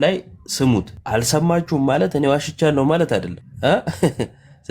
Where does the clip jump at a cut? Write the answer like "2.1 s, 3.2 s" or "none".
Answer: 1.0 s, 3.4 s